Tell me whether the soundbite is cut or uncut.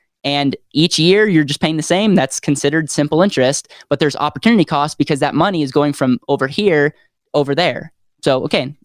uncut